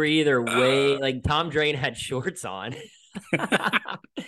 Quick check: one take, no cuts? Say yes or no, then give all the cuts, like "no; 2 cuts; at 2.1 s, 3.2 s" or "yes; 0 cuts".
yes; 0 cuts